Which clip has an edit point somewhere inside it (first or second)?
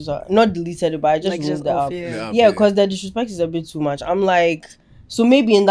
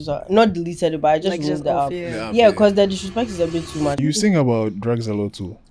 second